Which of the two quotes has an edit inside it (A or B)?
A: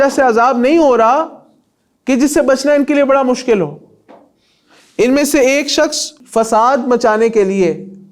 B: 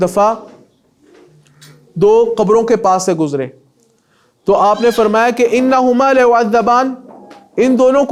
A